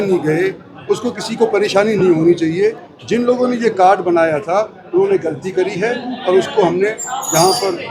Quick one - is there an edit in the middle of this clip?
no; 0 cuts

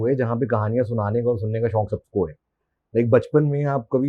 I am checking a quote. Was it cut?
no; 0 cuts

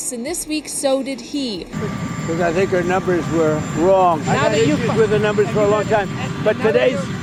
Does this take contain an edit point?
no; 0 cuts

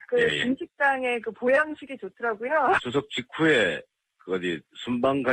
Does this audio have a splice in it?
yes; 1 cut; at 3.3 s

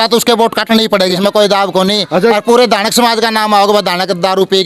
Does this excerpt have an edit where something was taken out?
yes; 1 cut; at 1.1 s

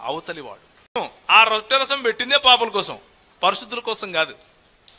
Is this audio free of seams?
no; 1 cut; at 1.0 s

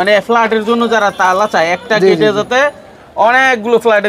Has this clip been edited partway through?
no; 0 cuts

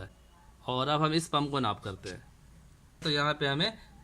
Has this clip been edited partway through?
yes; 1 cut; at 3.0 s

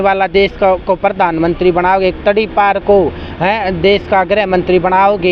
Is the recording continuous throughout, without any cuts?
yes; 0 cuts

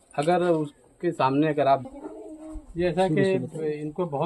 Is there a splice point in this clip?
yes; 1 cut; at 1.8 s

